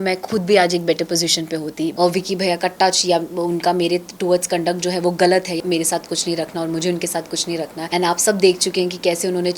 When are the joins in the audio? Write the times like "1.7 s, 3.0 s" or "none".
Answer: 1.9 s, 5.6 s, 7.8 s